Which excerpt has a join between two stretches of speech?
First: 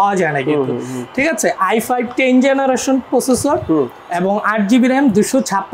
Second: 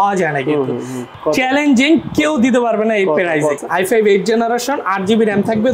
second; 2 cuts; at 1.1 s, 3.6 s

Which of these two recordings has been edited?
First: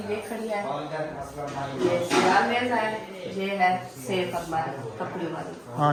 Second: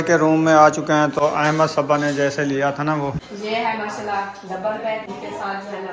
second; 3 cuts; at 1.2 s, 3.2 s, 5.1 s

